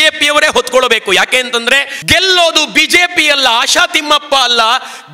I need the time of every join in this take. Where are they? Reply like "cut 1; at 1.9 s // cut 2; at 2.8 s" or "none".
cut 1; at 1.9 s

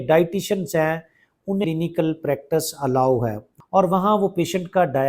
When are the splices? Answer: cut 1; at 1.6 s // cut 2; at 3.5 s

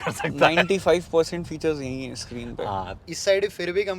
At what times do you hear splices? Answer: cut 1; at 3.1 s

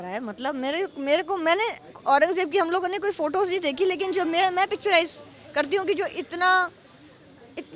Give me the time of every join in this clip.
none

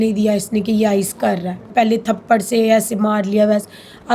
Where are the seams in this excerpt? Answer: cut 1; at 1.7 s

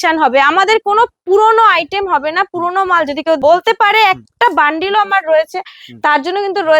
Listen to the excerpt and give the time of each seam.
cut 1; at 3.4 s

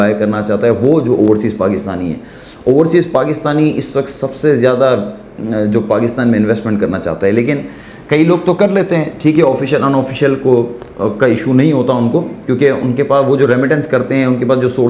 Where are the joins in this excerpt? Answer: none

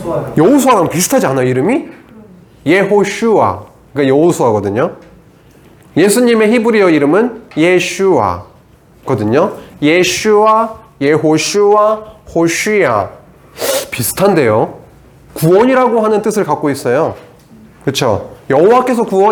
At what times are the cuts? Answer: none

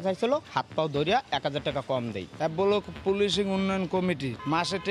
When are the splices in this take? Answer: cut 1; at 2.2 s

